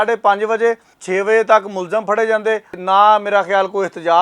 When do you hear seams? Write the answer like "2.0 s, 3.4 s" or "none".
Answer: 0.9 s, 2.8 s